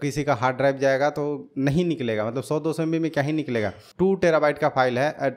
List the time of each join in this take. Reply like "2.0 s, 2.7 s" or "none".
3.8 s

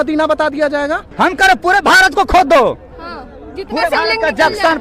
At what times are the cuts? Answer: 1.1 s

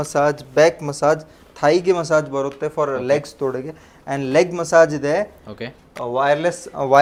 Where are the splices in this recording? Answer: none

